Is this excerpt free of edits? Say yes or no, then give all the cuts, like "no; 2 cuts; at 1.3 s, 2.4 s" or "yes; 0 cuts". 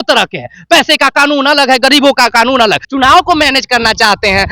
no; 1 cut; at 2.8 s